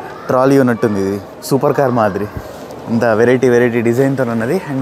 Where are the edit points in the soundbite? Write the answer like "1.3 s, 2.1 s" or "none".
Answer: none

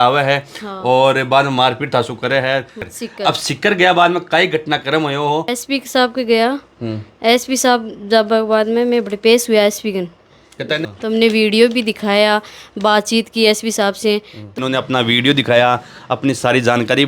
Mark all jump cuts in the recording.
2.8 s, 5.6 s, 10.7 s, 14.6 s

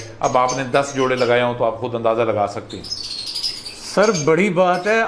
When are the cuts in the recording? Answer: none

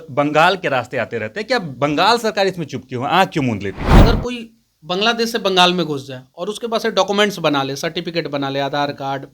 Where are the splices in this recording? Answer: 3.9 s

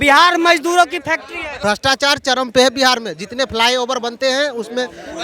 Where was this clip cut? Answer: 1.5 s

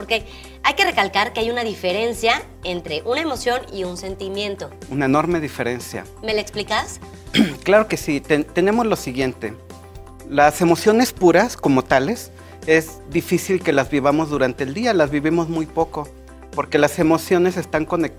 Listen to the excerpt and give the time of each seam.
none

